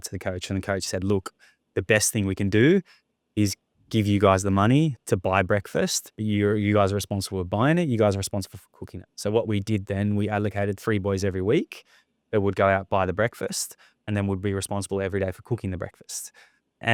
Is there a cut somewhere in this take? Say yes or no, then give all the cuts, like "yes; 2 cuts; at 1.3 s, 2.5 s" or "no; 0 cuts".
no; 0 cuts